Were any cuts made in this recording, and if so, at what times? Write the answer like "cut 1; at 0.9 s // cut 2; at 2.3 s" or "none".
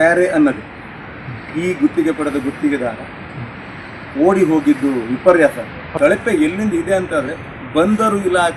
cut 1; at 5.9 s